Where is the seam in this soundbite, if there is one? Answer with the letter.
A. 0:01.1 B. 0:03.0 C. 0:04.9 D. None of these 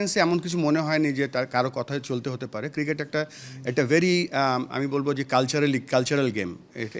D